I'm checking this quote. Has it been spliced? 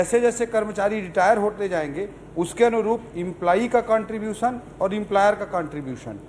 no; 0 cuts

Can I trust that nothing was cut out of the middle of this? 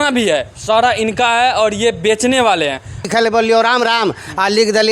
no; 1 cut; at 3.1 s

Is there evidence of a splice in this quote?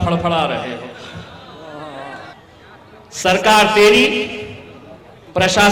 yes; 1 cut; at 2.3 s

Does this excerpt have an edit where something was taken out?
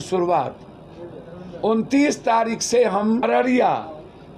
yes; 1 cut; at 3.2 s

